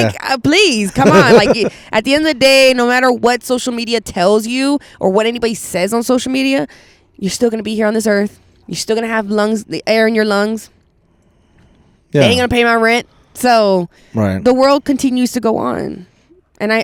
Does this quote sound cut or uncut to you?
uncut